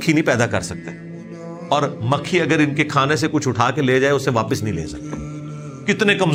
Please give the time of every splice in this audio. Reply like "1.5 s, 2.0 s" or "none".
none